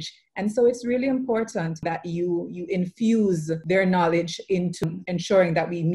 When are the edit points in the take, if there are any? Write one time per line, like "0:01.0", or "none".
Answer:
0:01.8
0:03.5
0:04.8